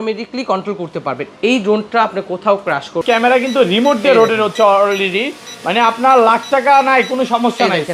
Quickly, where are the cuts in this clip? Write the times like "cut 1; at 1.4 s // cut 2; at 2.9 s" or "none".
cut 1; at 3.0 s